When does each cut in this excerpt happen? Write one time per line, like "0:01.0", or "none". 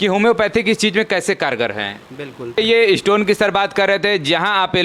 0:02.6